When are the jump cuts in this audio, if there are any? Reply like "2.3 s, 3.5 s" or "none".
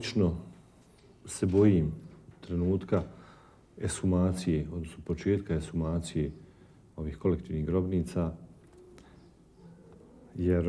none